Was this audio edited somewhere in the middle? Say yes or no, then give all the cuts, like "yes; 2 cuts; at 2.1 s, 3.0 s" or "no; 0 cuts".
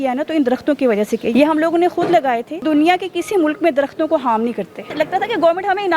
yes; 3 cuts; at 1.3 s, 2.6 s, 4.9 s